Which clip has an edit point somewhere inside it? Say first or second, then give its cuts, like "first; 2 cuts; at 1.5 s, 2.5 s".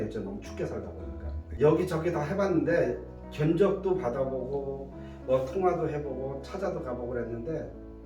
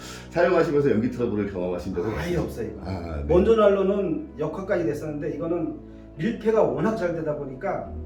first; 1 cut; at 1.4 s